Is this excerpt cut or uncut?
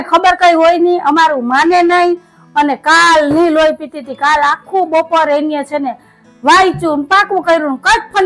uncut